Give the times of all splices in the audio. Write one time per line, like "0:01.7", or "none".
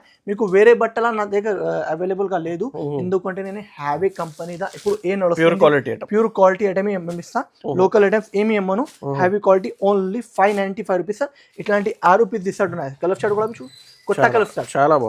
none